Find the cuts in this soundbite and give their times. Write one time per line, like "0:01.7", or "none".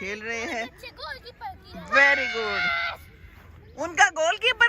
none